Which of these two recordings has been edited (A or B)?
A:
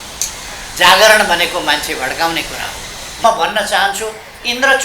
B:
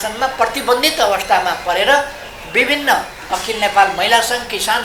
A